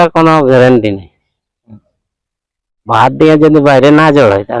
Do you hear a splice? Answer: no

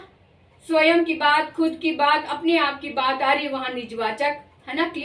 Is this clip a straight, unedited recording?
yes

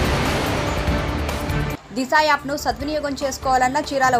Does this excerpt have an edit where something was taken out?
no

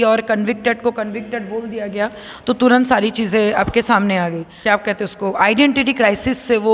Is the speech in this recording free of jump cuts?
no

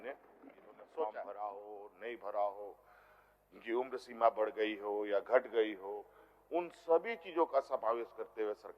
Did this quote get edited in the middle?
yes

